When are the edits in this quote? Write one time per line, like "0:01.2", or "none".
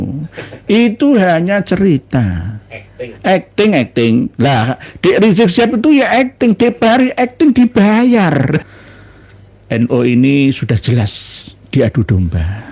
0:08.6